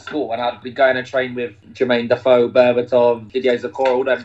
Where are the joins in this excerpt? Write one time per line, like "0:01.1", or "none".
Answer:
0:03.3